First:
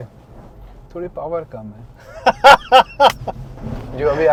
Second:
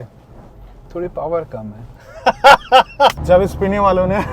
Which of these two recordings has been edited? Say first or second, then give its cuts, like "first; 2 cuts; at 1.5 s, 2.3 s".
second; 1 cut; at 3.2 s